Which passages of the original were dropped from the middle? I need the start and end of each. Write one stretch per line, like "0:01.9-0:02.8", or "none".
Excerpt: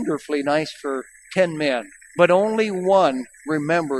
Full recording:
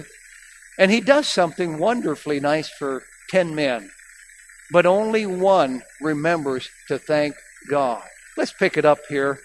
0:03.9-0:04.5